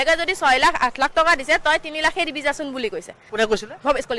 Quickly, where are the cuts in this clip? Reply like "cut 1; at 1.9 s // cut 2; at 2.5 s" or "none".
cut 1; at 3.2 s

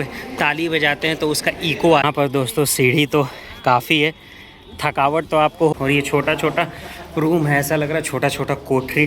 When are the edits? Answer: cut 1; at 2.0 s // cut 2; at 5.7 s

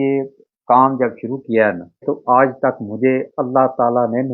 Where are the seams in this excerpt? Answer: cut 1; at 2.0 s

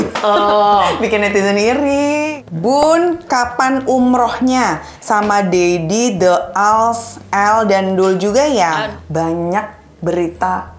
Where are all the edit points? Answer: cut 1; at 2.3 s // cut 2; at 8.8 s

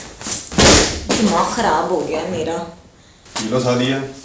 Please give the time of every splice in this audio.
cut 1; at 3.2 s

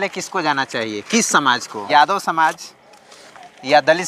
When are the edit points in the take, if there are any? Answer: cut 1; at 1.9 s

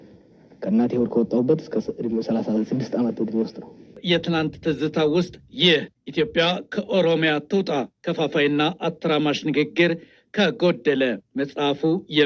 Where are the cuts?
cut 1; at 4.0 s

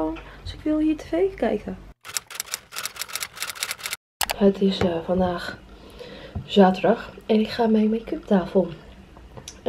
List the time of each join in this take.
none

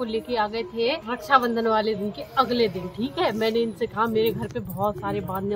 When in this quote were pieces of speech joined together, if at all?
cut 1; at 1.1 s

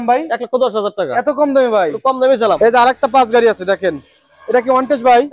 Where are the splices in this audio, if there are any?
cut 1; at 2.6 s

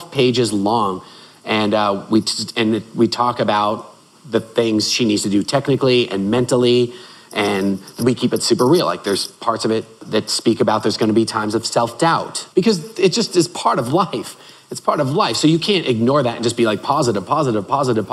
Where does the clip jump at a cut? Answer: cut 1; at 8.0 s // cut 2; at 10.0 s // cut 3; at 12.4 s

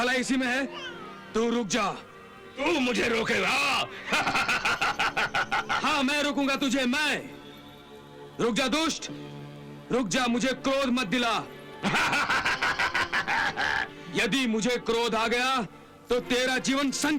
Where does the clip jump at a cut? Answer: none

